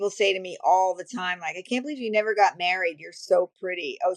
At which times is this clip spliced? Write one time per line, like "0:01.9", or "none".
none